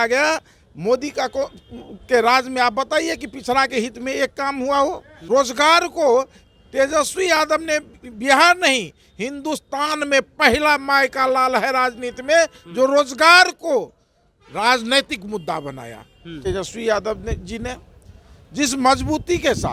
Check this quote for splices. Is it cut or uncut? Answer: cut